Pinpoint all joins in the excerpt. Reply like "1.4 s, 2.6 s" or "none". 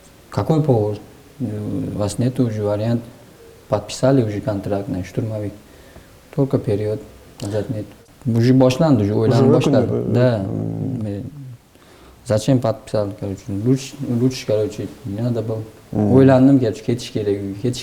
8.1 s